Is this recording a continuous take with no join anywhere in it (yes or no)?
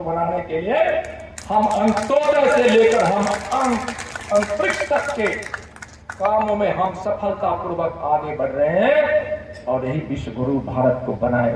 yes